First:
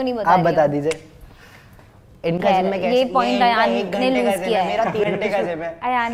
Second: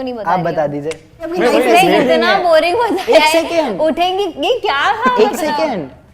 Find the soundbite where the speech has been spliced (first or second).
second